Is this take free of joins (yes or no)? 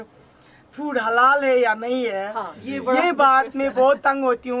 yes